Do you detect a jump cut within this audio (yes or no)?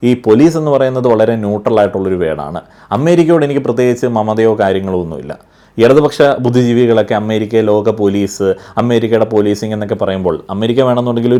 no